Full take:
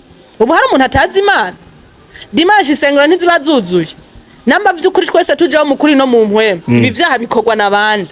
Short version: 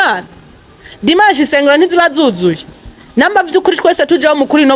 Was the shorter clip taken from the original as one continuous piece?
yes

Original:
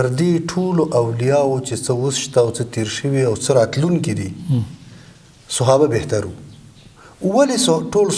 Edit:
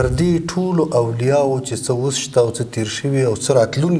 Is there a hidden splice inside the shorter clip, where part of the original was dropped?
no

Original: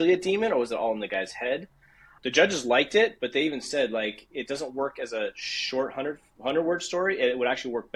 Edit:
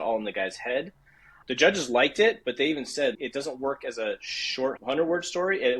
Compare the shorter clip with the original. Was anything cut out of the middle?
yes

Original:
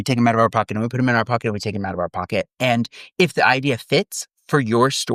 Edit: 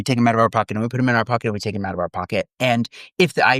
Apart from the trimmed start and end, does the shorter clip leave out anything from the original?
no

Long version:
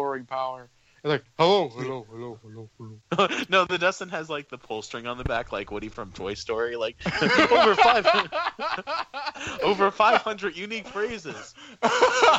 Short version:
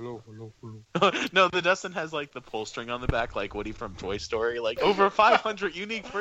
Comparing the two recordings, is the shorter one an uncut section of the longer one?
no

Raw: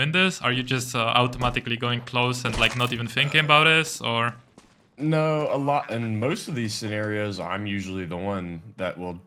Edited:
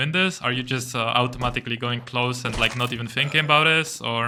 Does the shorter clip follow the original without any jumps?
yes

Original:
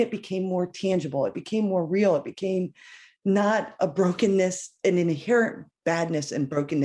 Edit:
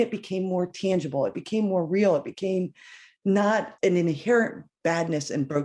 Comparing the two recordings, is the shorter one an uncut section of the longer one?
no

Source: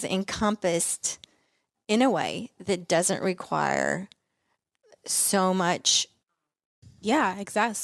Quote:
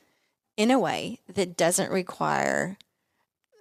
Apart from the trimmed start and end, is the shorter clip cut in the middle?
no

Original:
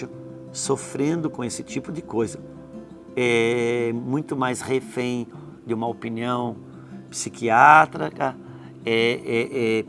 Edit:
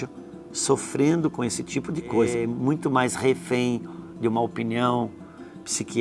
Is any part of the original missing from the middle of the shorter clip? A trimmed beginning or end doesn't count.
yes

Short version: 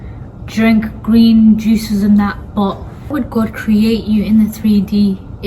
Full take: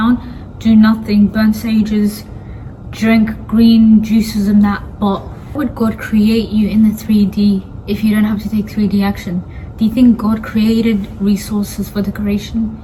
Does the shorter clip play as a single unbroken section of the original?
yes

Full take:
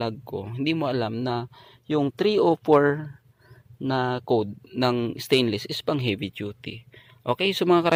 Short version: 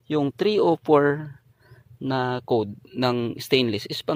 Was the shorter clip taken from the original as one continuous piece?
yes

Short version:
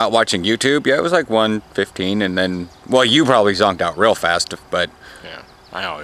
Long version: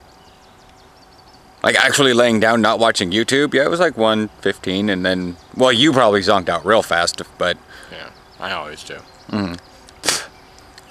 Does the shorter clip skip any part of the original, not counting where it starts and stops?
no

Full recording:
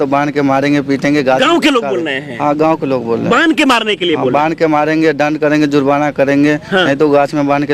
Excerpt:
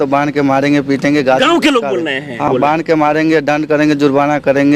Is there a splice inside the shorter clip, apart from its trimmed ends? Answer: yes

